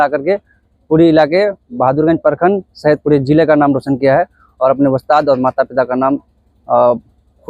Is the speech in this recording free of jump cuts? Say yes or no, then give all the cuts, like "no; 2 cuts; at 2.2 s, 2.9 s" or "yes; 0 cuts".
yes; 0 cuts